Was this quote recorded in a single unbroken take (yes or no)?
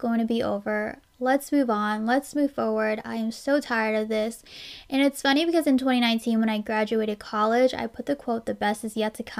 yes